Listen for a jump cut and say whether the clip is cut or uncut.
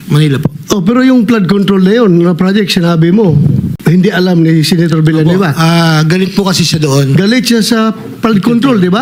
uncut